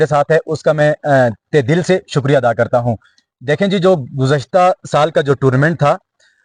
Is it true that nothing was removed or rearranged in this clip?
yes; 0 cuts

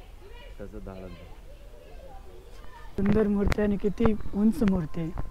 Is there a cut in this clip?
yes; 1 cut; at 3.0 s

